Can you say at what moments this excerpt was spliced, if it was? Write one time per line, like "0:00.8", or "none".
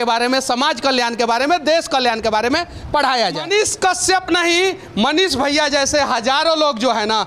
0:03.4